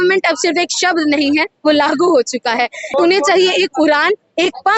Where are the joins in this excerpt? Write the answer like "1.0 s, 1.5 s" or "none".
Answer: 2.9 s